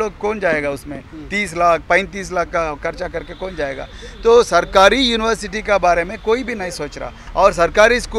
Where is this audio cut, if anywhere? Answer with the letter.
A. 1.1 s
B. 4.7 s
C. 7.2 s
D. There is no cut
C